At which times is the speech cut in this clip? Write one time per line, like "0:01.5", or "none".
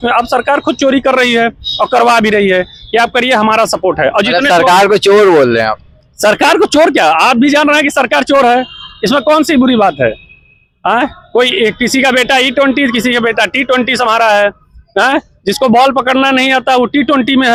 none